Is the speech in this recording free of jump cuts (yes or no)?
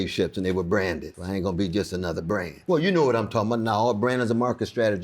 no